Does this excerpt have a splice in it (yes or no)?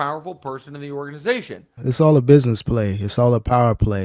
no